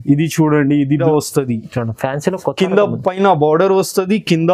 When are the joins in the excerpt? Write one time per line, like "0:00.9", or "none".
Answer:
0:01.0